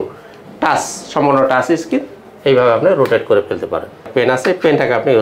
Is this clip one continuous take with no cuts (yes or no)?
no